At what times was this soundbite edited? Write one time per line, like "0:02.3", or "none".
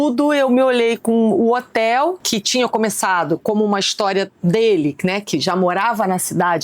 0:02.2